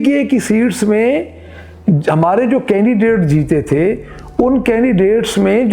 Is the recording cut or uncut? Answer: uncut